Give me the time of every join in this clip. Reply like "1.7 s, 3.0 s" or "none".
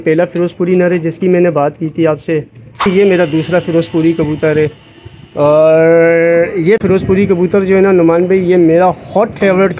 2.8 s, 6.8 s